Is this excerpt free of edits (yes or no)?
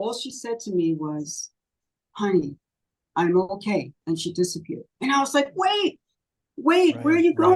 no